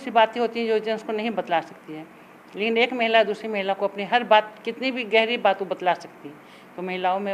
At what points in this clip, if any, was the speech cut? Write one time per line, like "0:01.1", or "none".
none